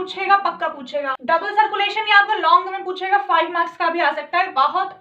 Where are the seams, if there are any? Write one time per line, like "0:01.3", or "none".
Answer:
0:01.2